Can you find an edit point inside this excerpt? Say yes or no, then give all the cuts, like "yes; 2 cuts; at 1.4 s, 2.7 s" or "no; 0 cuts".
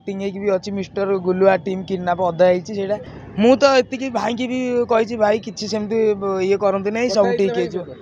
yes; 1 cut; at 3.2 s